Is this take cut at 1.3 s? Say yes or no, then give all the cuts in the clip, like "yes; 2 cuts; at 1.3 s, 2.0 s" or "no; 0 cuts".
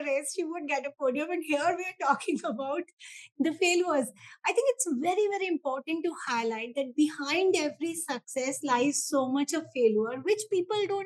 no; 0 cuts